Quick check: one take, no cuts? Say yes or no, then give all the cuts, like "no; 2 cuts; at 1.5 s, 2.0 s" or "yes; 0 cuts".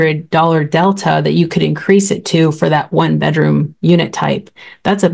yes; 0 cuts